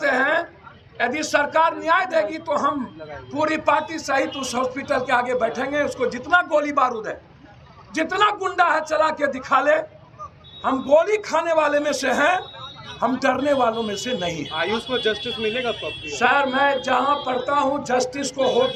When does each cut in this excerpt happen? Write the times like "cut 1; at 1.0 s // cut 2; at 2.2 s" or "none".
none

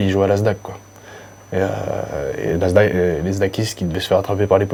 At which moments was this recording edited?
none

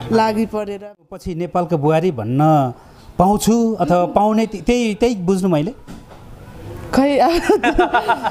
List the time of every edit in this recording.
cut 1; at 1.1 s

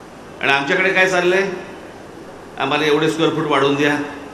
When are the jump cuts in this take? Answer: none

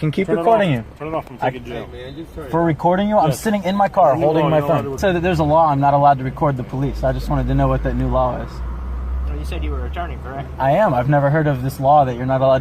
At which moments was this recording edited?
cut 1; at 5.0 s

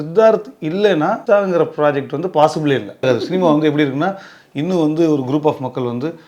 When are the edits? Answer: cut 1; at 1.2 s // cut 2; at 3.0 s

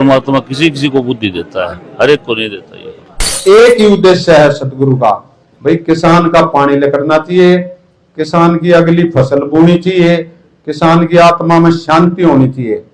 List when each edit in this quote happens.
cut 1; at 3.4 s

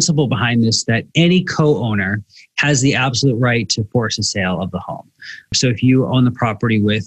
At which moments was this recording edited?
cut 1; at 5.5 s

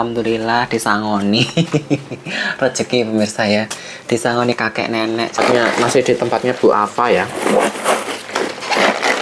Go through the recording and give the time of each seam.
cut 1; at 5.4 s

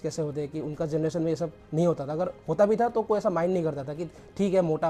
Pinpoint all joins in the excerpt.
none

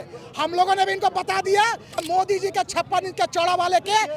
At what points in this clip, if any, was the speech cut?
cut 1; at 2.0 s

